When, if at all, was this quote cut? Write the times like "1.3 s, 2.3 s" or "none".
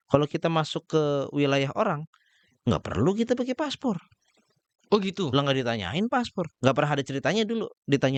none